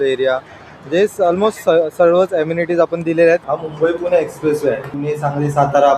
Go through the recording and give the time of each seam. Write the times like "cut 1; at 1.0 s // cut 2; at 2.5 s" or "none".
cut 1; at 3.4 s // cut 2; at 4.9 s